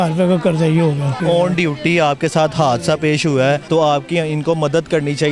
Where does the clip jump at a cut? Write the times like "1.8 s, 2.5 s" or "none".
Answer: 1.2 s, 3.6 s

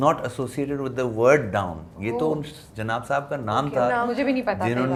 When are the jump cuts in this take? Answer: none

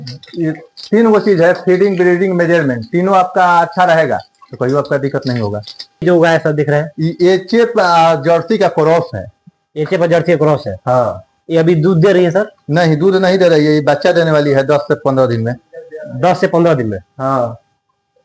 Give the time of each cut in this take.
6.0 s

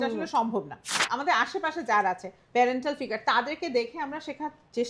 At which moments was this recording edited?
1.0 s, 2.3 s

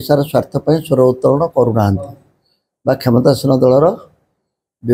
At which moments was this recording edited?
none

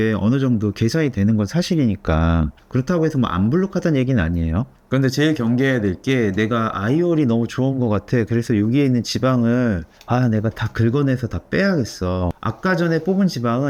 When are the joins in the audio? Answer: none

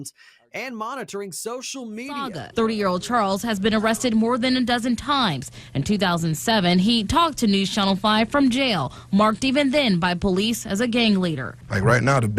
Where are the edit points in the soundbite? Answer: 2.4 s

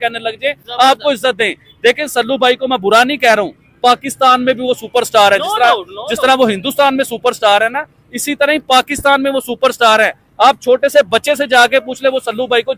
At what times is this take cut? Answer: none

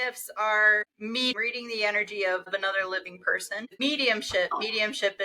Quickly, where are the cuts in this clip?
1.3 s, 2.5 s, 3.8 s

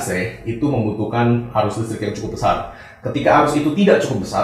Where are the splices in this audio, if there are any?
none

